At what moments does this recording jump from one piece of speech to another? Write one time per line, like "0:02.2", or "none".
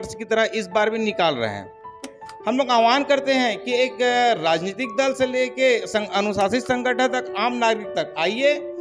0:02.2